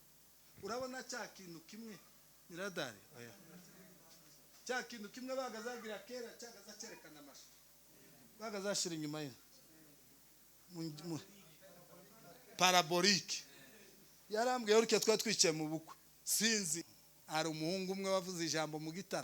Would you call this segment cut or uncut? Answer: cut